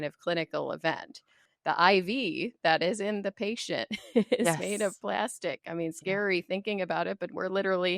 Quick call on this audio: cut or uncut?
cut